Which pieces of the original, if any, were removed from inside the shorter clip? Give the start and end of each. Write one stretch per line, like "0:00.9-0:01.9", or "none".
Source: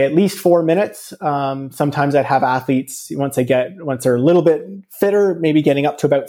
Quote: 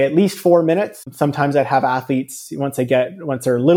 0:01.0-0:01.6